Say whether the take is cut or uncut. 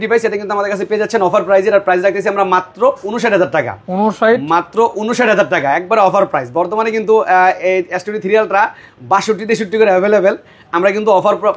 uncut